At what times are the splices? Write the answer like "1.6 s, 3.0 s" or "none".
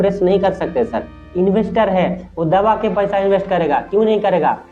1.2 s